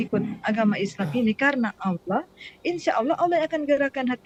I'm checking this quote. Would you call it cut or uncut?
uncut